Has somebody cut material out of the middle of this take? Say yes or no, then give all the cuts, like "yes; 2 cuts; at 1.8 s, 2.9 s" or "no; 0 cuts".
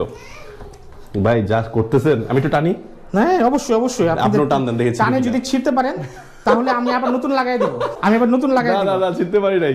yes; 1 cut; at 8.0 s